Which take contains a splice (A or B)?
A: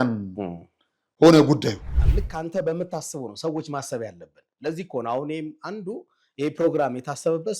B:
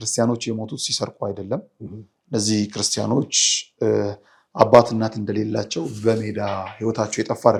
A